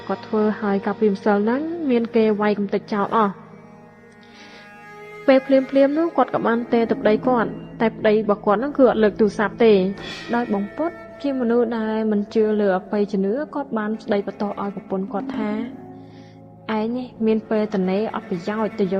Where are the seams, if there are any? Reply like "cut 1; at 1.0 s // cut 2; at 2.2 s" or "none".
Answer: cut 1; at 10.1 s